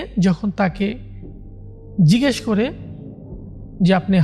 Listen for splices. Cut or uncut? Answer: uncut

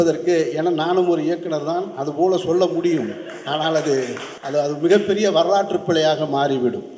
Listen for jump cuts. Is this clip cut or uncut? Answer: cut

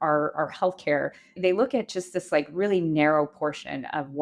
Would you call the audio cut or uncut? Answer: cut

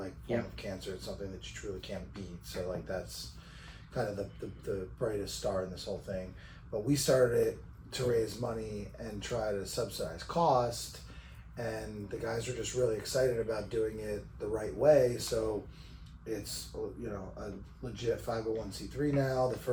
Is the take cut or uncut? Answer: uncut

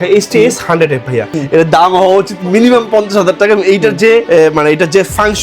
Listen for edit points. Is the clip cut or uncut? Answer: cut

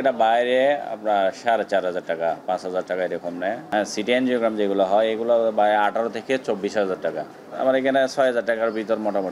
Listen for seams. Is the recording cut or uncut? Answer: uncut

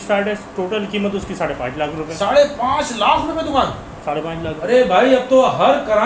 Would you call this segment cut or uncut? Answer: uncut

